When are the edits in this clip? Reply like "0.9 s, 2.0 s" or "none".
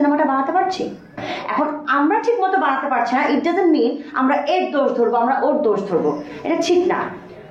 1.3 s